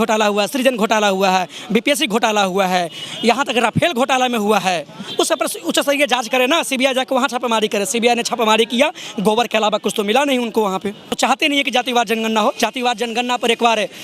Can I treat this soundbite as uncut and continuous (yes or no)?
no